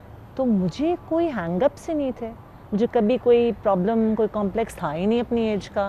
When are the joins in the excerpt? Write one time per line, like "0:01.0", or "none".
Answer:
none